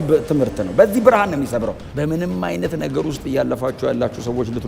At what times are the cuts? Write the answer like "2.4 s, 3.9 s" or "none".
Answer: 1.8 s